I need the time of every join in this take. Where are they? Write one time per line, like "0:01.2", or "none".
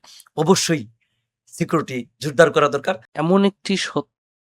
0:03.1